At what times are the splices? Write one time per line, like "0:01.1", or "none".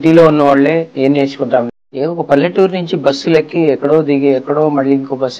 0:00.9
0:01.7